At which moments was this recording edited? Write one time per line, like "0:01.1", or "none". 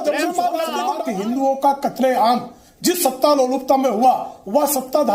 0:01.0